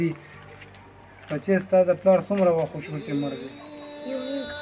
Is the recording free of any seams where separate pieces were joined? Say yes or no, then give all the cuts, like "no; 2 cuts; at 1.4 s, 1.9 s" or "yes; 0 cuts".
yes; 0 cuts